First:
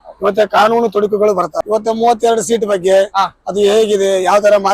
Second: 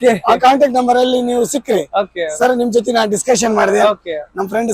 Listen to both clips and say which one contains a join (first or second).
first